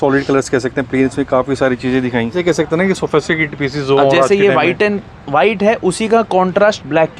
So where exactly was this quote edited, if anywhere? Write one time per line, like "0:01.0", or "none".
0:02.4